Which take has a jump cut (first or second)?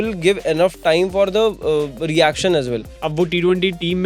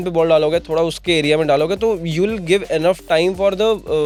first